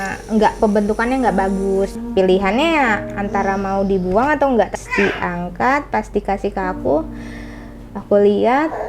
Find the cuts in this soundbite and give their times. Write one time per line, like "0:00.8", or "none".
0:02.0
0:04.7